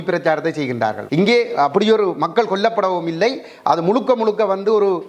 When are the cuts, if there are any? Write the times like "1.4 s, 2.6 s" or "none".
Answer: 1.0 s